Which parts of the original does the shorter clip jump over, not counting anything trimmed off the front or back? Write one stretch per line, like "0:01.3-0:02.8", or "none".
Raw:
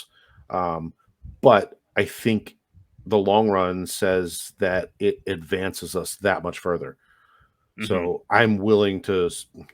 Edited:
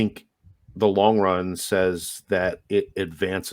none